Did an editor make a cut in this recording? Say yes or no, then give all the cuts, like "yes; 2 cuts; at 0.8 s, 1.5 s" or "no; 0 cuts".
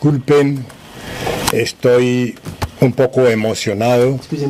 no; 0 cuts